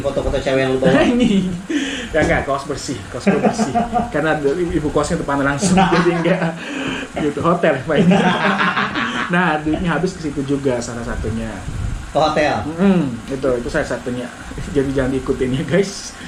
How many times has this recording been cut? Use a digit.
0